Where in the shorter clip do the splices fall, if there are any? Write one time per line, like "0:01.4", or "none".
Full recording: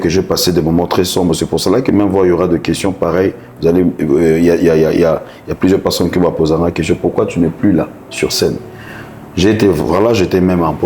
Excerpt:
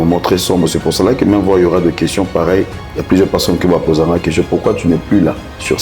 0:02.8